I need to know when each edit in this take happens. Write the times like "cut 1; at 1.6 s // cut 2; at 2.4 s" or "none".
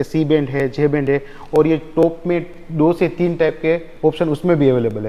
none